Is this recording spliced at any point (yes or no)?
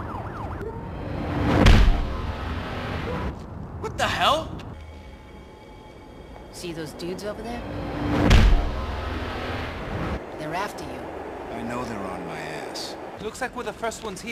yes